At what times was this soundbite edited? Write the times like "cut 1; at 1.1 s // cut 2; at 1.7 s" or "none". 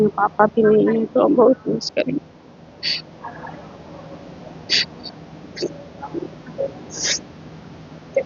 none